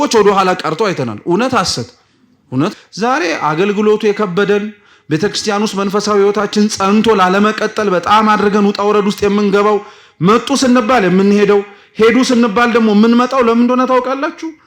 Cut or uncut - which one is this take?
cut